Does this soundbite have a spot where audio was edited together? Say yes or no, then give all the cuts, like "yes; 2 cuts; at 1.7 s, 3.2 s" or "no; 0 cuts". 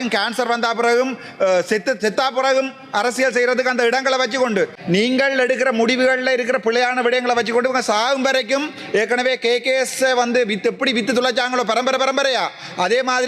yes; 1 cut; at 4.8 s